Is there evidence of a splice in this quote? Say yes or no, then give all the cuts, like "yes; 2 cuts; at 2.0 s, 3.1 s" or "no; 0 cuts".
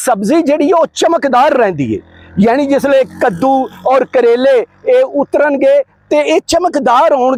no; 0 cuts